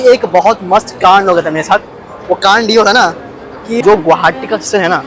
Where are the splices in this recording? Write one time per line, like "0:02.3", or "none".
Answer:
0:03.7